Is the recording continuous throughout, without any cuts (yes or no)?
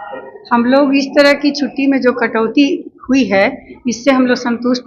yes